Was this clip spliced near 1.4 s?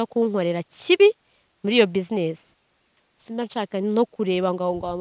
no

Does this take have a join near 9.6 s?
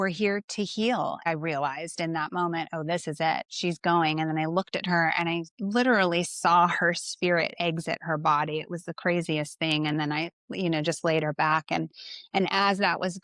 no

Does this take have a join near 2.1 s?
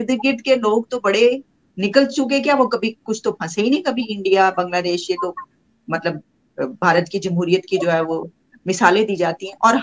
no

